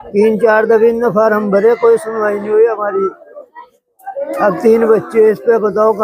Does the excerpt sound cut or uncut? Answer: uncut